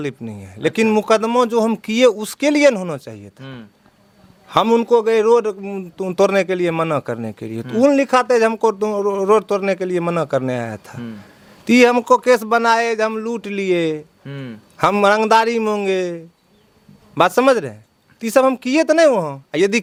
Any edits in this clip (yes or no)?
no